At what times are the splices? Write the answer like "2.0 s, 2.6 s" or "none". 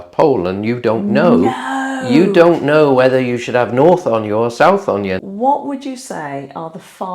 5.2 s